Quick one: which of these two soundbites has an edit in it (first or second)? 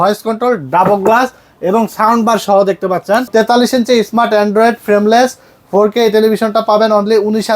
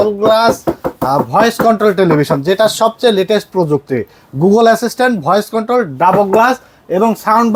first